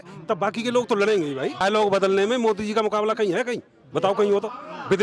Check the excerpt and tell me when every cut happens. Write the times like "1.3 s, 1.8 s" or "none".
1.6 s